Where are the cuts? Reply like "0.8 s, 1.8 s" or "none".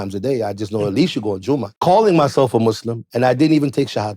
1.7 s